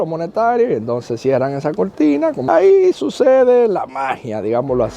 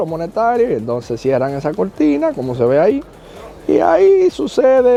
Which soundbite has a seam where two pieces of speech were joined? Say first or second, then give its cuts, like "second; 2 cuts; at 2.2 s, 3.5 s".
first; 1 cut; at 2.5 s